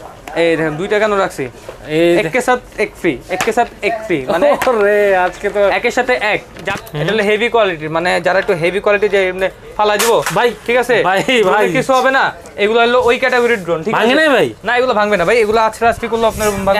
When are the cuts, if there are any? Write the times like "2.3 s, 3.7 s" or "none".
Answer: 6.6 s